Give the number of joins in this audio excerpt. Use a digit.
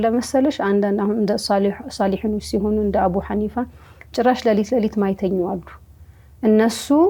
0